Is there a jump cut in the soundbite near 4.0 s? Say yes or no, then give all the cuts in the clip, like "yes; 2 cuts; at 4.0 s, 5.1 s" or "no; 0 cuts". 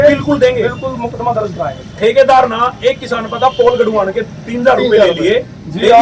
no; 0 cuts